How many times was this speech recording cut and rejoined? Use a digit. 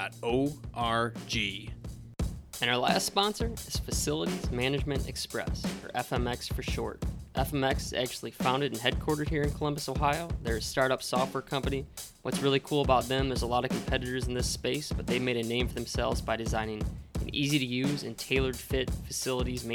1